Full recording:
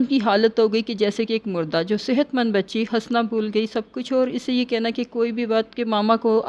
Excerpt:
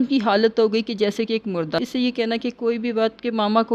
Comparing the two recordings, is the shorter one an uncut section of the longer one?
no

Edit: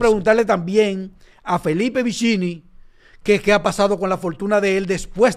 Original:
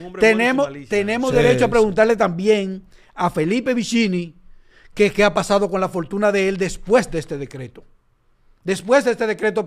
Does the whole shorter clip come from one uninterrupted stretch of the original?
yes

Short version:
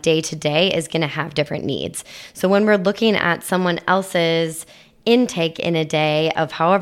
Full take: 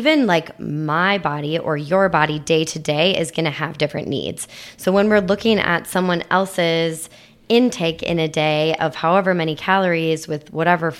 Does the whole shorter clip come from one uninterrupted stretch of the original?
yes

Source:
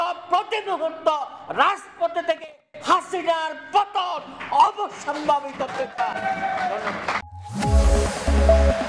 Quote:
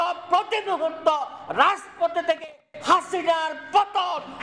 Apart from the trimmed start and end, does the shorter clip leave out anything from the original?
no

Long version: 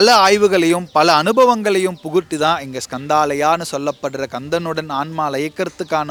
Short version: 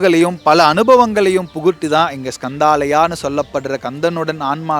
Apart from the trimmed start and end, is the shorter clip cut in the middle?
no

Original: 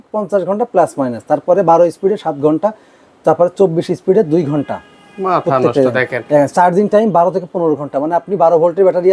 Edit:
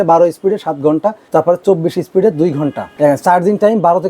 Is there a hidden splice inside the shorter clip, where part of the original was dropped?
yes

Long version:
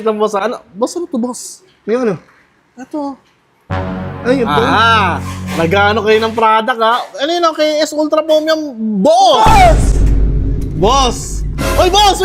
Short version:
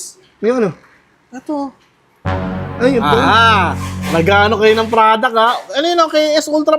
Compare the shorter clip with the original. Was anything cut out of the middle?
no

